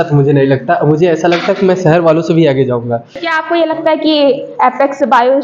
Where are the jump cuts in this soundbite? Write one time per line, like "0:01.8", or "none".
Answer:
0:03.3